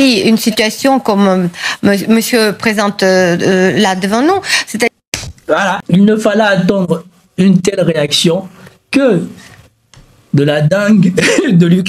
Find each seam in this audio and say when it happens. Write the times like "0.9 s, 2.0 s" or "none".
none